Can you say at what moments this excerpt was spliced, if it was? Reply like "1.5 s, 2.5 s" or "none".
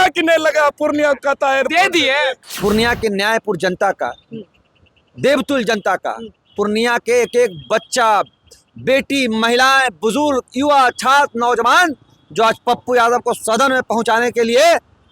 2.4 s